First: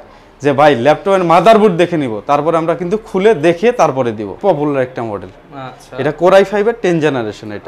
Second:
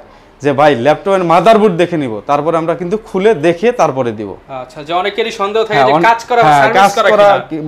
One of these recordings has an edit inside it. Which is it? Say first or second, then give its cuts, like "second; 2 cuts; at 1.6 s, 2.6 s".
first; 1 cut; at 4.4 s